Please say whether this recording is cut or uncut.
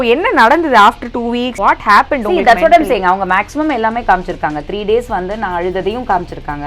cut